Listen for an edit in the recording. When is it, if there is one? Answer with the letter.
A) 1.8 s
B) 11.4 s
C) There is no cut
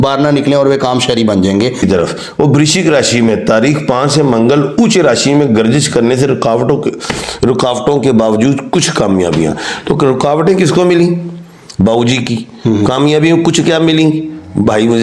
A